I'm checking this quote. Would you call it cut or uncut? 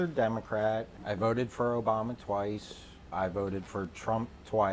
cut